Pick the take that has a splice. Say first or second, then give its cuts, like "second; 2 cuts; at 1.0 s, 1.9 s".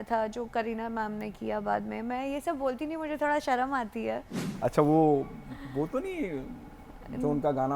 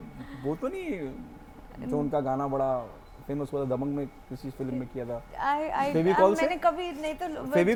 first; 1 cut; at 4.4 s